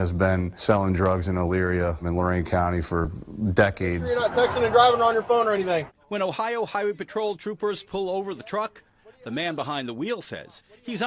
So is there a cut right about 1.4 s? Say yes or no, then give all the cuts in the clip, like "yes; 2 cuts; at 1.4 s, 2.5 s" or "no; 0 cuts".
no; 1 cut; at 4.1 s